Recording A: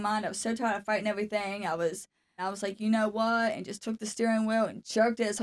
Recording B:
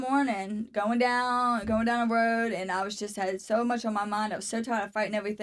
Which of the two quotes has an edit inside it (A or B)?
A